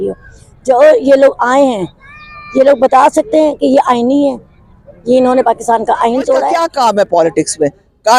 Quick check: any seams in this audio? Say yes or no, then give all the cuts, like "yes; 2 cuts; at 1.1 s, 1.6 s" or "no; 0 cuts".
yes; 1 cut; at 6.6 s